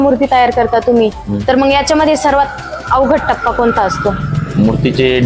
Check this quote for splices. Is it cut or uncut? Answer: uncut